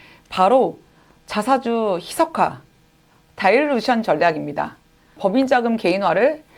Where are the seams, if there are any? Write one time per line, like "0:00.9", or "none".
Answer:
0:05.1